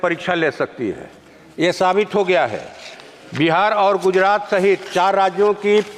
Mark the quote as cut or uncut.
uncut